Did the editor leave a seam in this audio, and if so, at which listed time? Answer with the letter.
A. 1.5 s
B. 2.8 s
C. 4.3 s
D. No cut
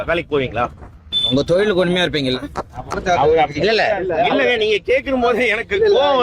B